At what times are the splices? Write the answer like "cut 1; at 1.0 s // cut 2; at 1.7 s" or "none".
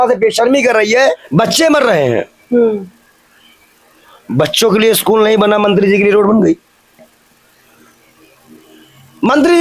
cut 1; at 1.2 s